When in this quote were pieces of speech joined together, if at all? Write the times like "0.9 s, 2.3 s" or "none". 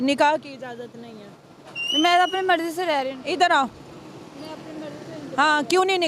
none

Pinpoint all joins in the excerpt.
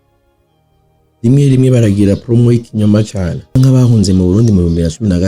3.6 s

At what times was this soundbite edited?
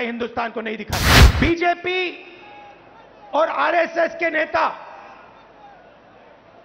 1.2 s

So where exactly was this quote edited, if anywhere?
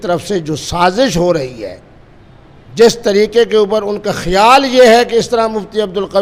none

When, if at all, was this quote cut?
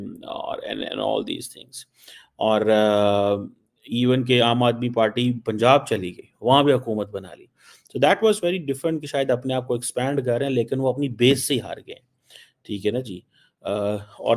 none

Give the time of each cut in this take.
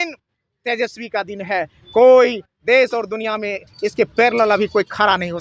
none

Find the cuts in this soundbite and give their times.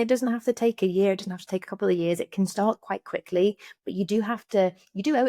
none

